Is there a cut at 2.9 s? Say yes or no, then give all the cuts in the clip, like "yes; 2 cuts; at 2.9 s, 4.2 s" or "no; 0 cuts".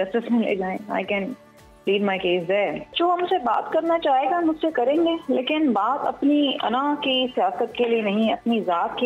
yes; 1 cut; at 2.9 s